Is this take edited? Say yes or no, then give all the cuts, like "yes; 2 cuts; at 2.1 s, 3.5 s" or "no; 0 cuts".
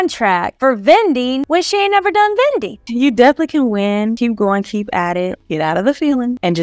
yes; 3 cuts; at 2.8 s, 4.2 s, 5.4 s